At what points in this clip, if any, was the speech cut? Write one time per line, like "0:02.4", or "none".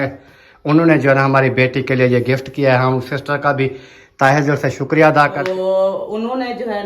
0:05.4